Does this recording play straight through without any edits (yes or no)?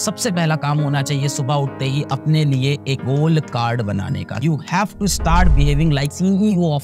no